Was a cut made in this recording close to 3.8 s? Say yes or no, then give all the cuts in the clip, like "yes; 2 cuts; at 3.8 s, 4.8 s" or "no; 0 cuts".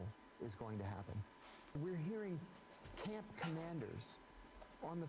no; 1 cut; at 1.7 s